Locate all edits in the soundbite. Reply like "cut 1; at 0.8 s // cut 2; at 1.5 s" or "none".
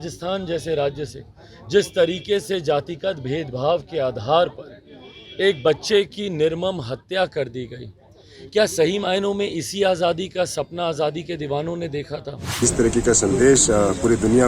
cut 1; at 12.6 s